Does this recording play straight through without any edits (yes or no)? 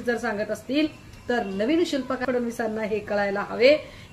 no